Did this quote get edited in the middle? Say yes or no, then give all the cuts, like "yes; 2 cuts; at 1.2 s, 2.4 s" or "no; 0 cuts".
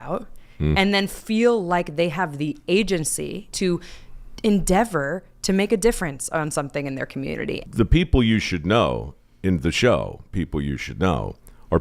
yes; 2 cuts; at 3.5 s, 7.6 s